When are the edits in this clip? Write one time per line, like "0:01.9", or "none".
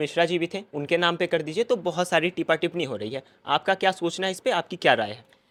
none

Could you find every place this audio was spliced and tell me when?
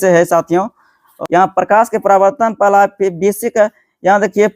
0:01.1

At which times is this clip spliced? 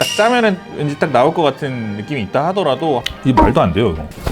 0:03.1

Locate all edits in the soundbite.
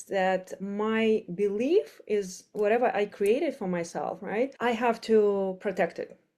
0:04.5

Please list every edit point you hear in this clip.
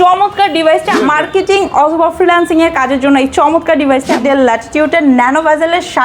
0:01.0
0:04.2

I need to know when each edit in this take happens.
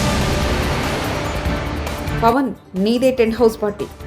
0:02.0

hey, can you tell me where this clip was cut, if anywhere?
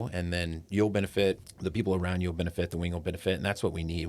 0:01.5

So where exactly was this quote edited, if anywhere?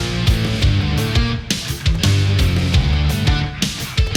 none

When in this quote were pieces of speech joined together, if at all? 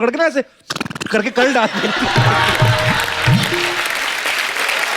none

